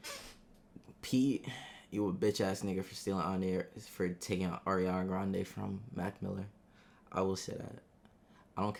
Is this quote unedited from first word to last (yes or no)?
yes